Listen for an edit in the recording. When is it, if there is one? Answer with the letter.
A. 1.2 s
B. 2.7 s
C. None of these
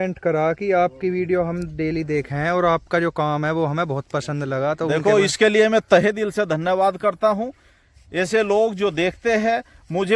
C